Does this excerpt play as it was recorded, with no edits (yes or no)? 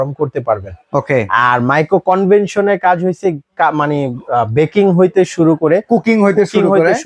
yes